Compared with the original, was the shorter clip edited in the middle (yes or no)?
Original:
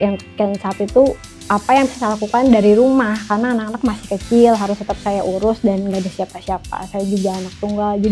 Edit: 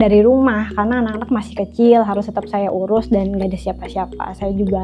no